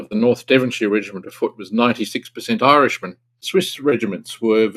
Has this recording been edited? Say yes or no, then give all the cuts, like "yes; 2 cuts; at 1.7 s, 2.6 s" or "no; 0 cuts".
yes; 1 cut; at 3.4 s